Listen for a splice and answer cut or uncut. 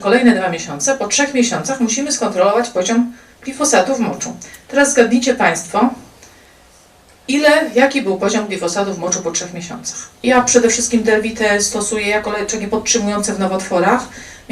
cut